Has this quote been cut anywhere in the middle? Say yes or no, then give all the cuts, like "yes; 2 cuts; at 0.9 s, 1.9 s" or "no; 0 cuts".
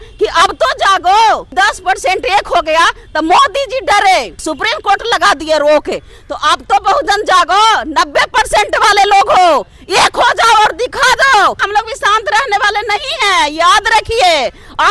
yes; 3 cuts; at 1.5 s, 4.4 s, 11.6 s